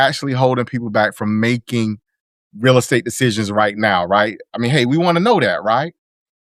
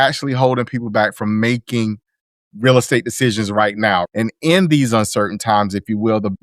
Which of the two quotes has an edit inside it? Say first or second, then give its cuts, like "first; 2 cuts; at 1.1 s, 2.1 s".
second; 1 cut; at 4.1 s